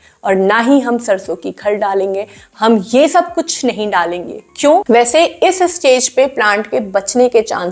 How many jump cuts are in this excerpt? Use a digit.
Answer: 1